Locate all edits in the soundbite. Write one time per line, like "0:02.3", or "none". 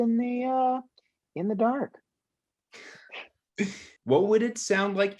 0:03.9

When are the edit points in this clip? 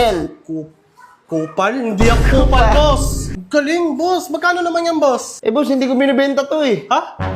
0:03.4

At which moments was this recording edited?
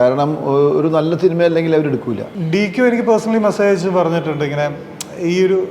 0:02.3

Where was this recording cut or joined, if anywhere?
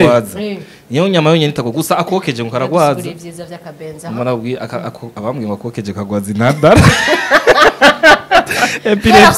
none

